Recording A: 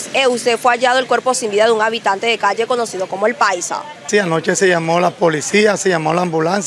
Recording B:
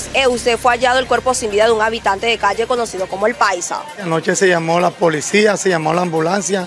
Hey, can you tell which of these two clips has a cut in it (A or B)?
B